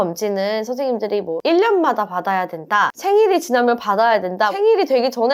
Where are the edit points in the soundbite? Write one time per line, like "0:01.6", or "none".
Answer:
0:01.3